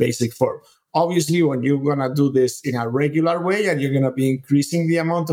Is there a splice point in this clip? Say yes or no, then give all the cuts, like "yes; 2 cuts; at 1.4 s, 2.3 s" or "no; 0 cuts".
no; 0 cuts